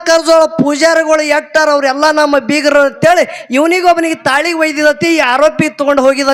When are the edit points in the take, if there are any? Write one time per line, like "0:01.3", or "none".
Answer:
none